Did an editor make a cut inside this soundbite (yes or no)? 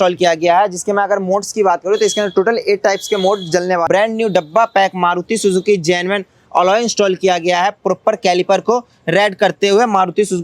yes